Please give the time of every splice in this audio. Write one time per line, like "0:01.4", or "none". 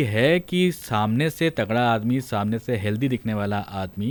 none